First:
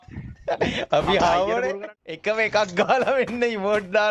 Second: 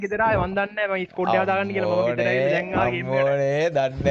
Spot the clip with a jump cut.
first; 1 cut; at 1.8 s

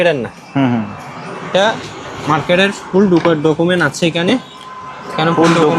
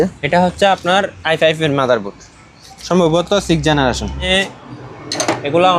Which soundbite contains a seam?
second; 1 cut; at 4.3 s

